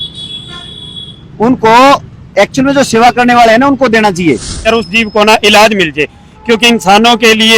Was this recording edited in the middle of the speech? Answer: yes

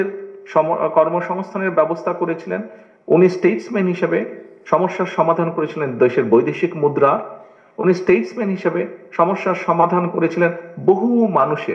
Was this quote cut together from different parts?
no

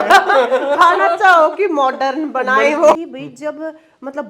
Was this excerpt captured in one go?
no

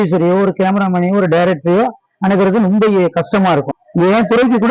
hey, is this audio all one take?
no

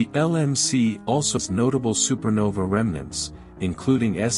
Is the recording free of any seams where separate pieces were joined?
no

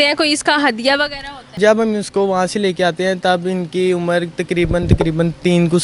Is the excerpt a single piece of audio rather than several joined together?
no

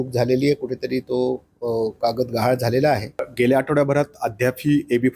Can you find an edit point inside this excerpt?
yes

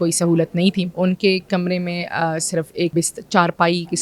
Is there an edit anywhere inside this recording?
yes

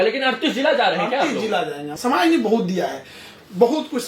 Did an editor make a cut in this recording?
yes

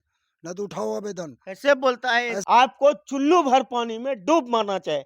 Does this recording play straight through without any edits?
no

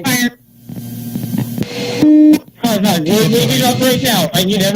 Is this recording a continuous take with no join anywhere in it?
no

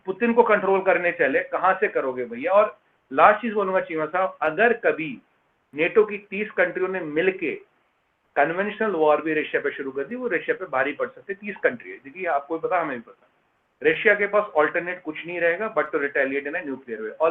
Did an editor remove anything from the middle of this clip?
no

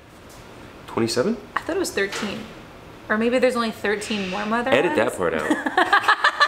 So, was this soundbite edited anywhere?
no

